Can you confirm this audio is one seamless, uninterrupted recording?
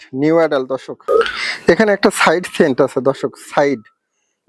no; 1 cut; at 0.9 s

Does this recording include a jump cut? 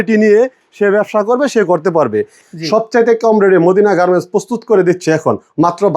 yes; 1 cut; at 2.4 s

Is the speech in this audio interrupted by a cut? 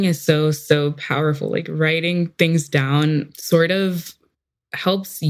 no; 0 cuts

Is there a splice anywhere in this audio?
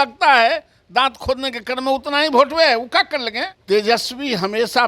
yes; 1 cut; at 3.5 s

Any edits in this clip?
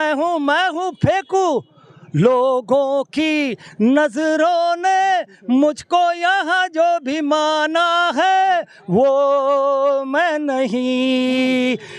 no; 0 cuts

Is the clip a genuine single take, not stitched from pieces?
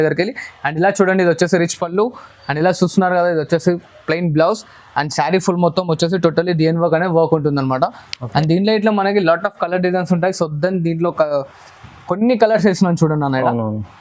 yes; 0 cuts

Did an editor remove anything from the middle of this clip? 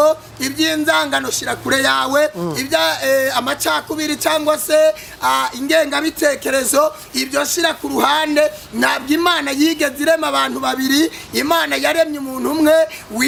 no; 0 cuts

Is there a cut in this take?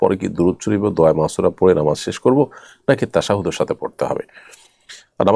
no; 0 cuts

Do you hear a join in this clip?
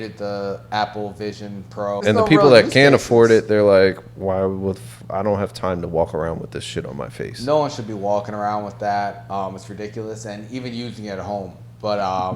yes; 1 cut; at 2.0 s

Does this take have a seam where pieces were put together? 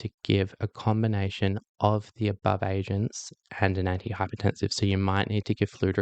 no; 0 cuts

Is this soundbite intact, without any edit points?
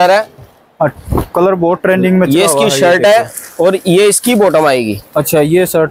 yes; 0 cuts

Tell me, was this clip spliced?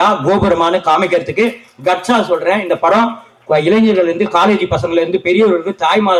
no; 0 cuts

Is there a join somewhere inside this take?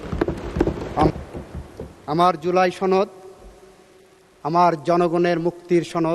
yes; 1 cut; at 1.1 s

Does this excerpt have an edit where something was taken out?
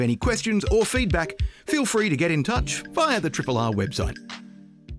yes; 1 cut; at 4.1 s

